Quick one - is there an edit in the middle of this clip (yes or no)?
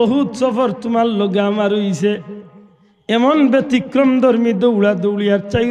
no